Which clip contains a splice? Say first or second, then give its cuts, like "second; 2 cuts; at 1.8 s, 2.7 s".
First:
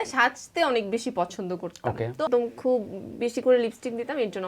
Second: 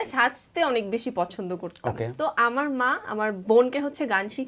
first; 1 cut; at 2.3 s